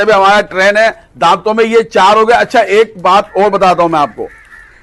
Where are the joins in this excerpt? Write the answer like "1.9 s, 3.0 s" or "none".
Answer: none